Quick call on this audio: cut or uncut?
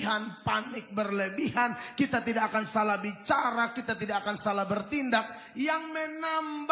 uncut